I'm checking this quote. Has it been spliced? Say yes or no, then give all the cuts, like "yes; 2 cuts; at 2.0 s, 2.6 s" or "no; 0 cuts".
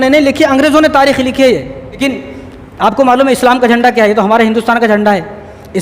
yes; 1 cut; at 2.0 s